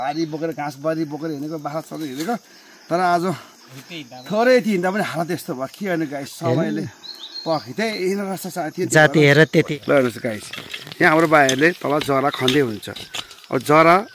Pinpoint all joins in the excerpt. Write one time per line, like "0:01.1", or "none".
0:09.7